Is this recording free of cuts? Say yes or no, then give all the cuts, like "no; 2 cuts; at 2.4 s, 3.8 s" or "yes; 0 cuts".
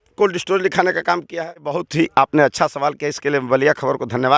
no; 1 cut; at 1.8 s